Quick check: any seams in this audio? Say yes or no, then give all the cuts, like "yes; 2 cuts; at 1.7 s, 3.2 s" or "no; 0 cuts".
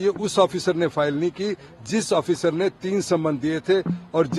no; 0 cuts